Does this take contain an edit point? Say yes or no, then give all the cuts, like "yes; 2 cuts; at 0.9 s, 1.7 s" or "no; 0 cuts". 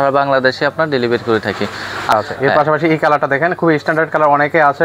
yes; 1 cut; at 2.1 s